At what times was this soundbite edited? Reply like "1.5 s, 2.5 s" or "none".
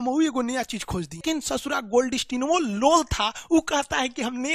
1.2 s